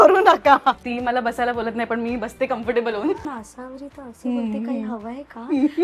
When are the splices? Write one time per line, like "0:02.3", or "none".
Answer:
0:00.9
0:03.2